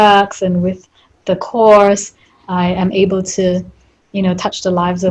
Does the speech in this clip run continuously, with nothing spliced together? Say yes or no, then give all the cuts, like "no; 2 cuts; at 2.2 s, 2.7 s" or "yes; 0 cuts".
yes; 0 cuts